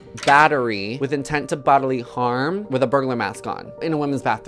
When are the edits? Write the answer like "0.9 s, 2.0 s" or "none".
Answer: 0.9 s, 2.6 s